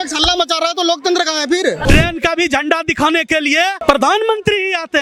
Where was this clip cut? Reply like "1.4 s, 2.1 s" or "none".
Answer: 1.8 s, 3.8 s